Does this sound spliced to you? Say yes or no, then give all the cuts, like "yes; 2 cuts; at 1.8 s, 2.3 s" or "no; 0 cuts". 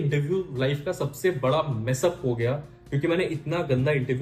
no; 0 cuts